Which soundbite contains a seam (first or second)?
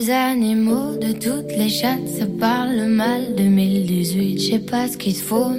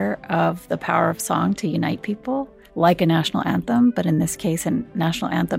second